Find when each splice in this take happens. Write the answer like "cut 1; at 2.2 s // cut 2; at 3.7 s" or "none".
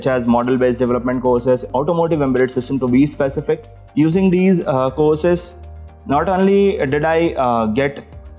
cut 1; at 1.7 s // cut 2; at 3.8 s